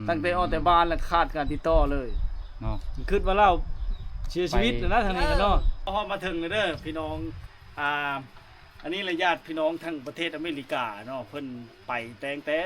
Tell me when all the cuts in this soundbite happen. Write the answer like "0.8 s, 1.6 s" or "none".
5.9 s